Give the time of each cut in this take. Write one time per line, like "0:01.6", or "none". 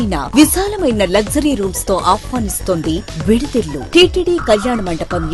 0:03.8